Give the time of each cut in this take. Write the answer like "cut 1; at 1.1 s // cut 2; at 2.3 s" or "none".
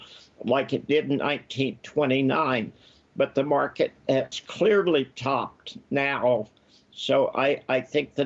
none